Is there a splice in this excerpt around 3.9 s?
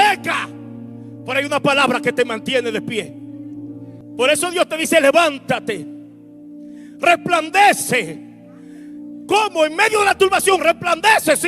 yes; 1 cut; at 3.9 s

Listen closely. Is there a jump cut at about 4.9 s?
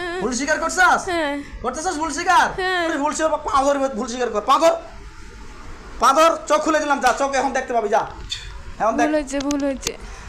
no; 1 cut; at 2.9 s

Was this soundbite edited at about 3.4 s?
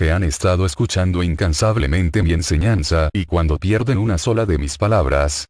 yes; 1 cut; at 3.4 s

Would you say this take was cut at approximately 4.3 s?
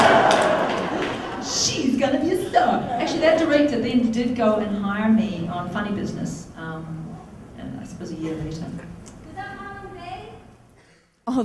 no; 0 cuts

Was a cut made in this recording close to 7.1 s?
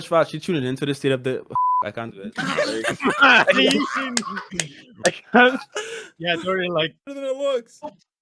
yes; 1 cut; at 7.1 s

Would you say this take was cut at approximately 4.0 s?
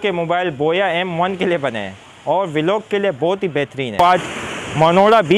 yes; 1 cut; at 4.0 s

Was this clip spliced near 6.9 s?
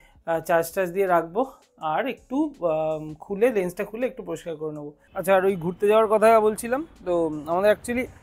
no; 1 cut; at 5.0 s

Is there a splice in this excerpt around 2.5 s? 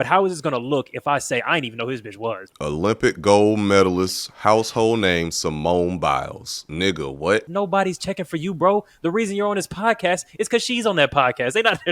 no; 1 cut; at 7.4 s

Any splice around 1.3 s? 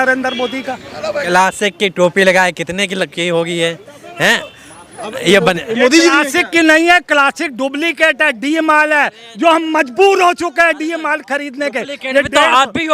yes; 1 cut; at 1.3 s

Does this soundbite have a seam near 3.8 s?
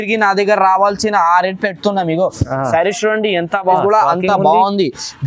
yes; 1 cut; at 3.8 s

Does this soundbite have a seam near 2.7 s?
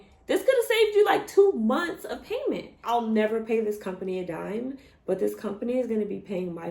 yes; 1 cut; at 2.7 s

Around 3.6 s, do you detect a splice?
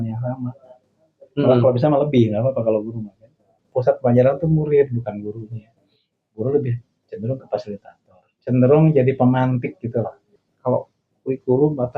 yes; 2 cuts; at 3.6 s, 10.5 s

